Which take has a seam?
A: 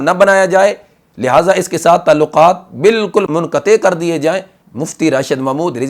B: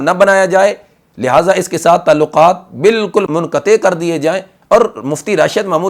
B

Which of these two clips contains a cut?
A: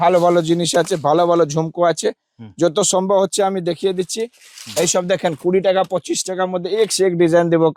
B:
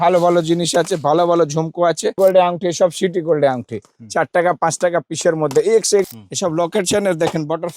B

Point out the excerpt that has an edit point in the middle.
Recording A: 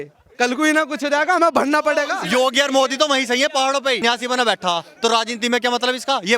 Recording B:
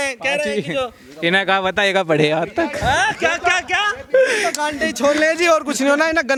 A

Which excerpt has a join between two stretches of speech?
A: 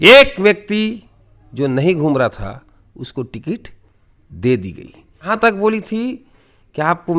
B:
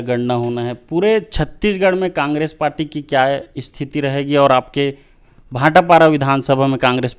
A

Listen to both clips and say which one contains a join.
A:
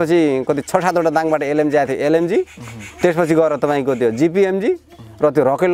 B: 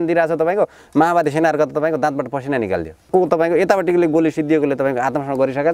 B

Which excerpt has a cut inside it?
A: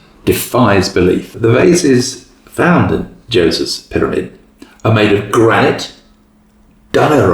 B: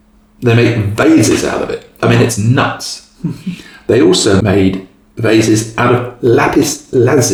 A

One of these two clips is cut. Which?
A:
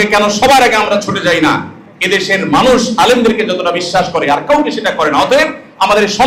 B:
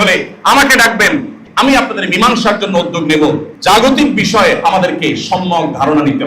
B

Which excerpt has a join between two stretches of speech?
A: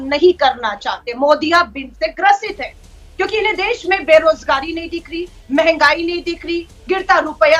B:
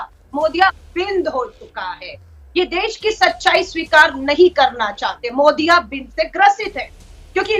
B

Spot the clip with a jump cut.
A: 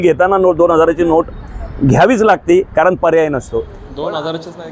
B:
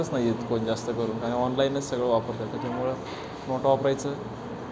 A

